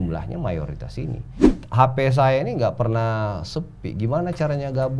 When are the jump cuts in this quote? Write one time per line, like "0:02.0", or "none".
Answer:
0:01.5

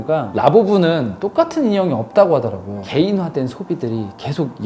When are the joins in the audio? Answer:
0:02.8

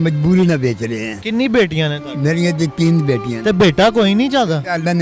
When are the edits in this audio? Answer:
none

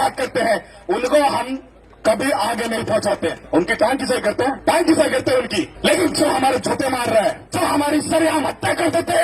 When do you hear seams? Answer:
0:03.4
0:04.6
0:05.7
0:07.4

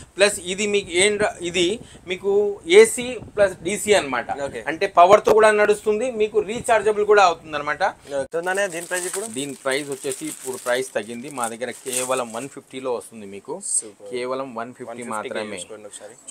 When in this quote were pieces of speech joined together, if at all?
0:08.3

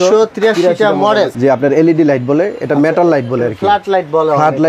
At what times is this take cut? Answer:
0:01.3

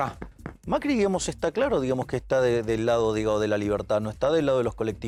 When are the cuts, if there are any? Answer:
none

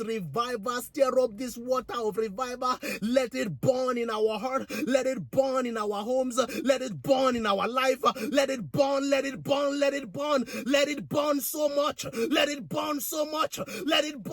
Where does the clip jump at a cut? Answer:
none

